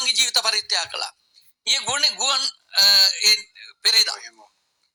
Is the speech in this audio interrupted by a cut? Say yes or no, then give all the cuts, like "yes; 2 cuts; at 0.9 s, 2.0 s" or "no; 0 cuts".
no; 0 cuts